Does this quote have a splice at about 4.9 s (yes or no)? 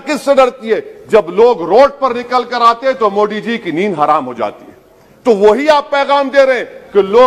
no